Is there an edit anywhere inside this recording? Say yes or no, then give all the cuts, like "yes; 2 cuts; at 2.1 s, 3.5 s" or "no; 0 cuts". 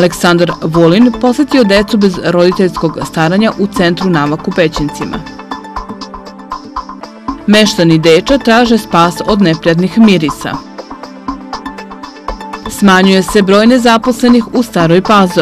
no; 0 cuts